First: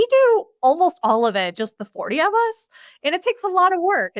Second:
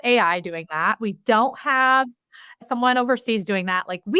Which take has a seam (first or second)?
second